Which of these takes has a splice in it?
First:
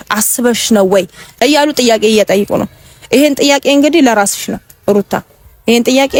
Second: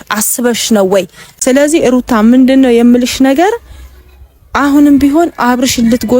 second; 1 cut; at 1.2 s

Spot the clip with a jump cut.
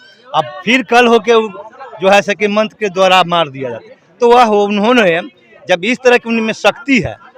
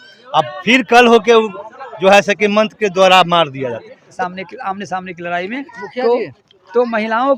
second; 1 cut; at 4.0 s

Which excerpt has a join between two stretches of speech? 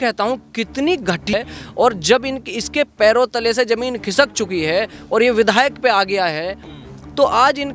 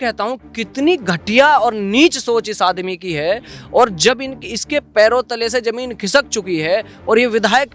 first; 1 cut; at 1.3 s

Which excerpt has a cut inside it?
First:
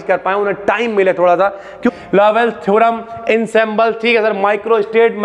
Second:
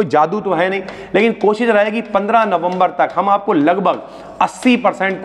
first; 1 cut; at 1.9 s

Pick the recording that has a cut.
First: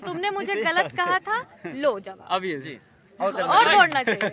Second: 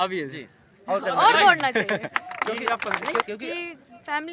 second; 1 cut; at 3.2 s

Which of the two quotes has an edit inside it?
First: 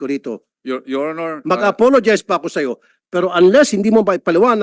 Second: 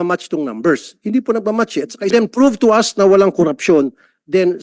second; 1 cut; at 2.1 s

